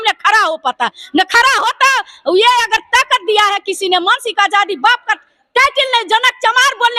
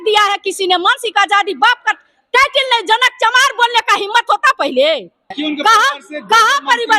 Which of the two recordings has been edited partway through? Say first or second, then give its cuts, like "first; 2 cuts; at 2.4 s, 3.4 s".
second; 1 cut; at 5.3 s